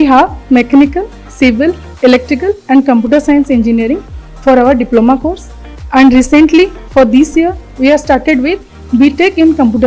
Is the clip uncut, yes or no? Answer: yes